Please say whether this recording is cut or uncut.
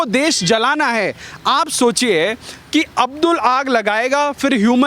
uncut